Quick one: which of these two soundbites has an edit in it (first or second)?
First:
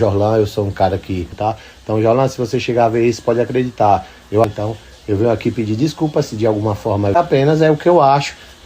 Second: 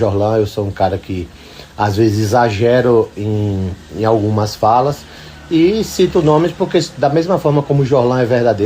first